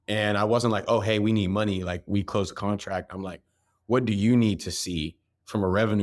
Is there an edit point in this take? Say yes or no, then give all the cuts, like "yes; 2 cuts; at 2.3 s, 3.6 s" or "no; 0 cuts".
no; 0 cuts